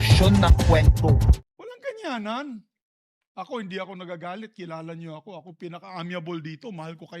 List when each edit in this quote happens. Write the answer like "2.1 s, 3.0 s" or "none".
1.4 s